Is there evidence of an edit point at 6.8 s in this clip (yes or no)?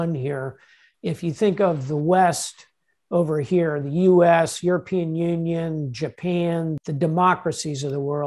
yes